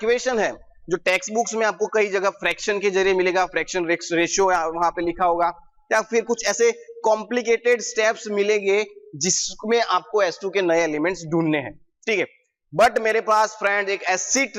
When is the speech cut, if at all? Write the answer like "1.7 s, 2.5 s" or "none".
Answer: none